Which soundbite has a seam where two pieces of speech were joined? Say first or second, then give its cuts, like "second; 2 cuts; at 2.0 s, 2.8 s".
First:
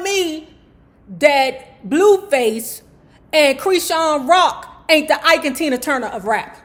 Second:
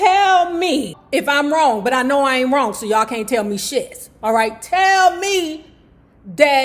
second; 1 cut; at 1.0 s